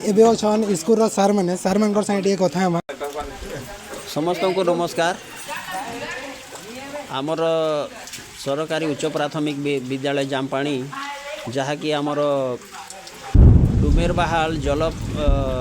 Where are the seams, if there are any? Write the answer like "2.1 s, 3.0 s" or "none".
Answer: 2.9 s